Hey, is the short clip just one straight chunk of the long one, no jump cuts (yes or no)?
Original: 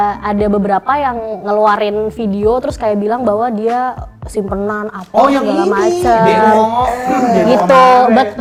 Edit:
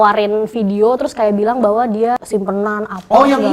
no